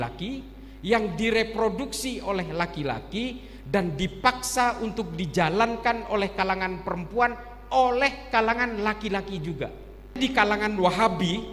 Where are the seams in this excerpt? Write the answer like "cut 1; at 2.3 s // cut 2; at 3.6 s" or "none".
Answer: cut 1; at 10.2 s